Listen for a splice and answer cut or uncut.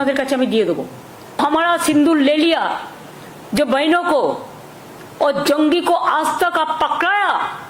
cut